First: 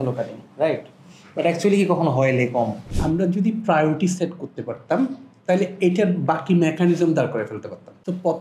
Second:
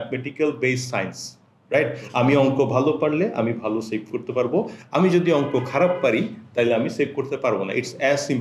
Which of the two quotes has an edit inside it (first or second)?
first